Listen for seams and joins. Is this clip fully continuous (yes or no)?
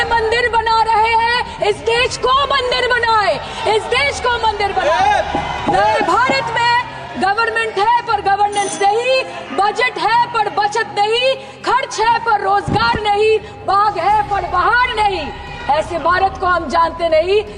yes